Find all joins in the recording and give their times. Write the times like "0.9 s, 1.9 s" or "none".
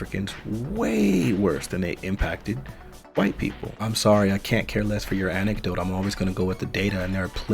3.7 s